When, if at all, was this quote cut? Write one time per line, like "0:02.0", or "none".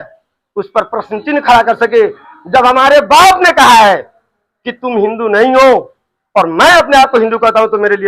none